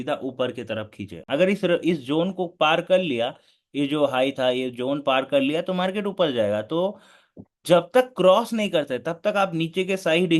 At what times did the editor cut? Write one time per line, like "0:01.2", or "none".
none